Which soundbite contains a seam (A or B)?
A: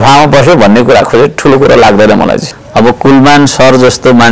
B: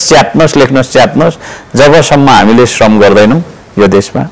A